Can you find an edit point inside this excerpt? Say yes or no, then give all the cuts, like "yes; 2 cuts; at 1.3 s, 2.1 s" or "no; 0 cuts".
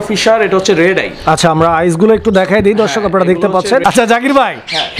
yes; 1 cut; at 3.8 s